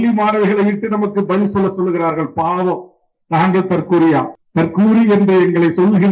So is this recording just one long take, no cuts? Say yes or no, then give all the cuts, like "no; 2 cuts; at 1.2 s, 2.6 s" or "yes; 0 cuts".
no; 1 cut; at 4.4 s